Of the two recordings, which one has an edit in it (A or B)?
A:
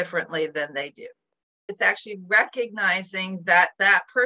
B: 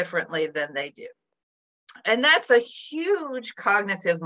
A